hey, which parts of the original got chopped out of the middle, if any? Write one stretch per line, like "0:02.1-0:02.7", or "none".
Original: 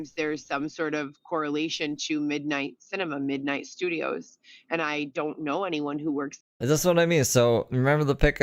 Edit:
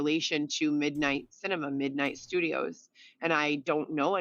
none